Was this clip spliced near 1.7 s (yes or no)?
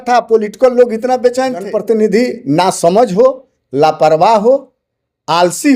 yes